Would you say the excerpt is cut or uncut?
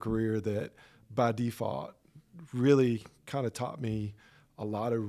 uncut